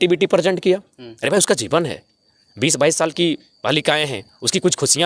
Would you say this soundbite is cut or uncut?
uncut